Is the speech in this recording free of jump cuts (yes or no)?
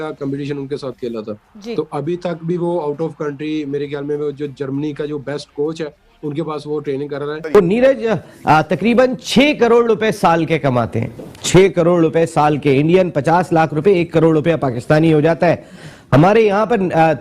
no